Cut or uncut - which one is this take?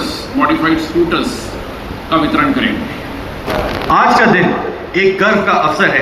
cut